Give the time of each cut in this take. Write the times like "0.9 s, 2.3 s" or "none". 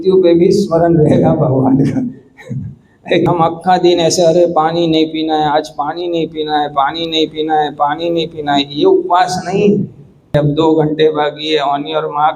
3.3 s, 10.3 s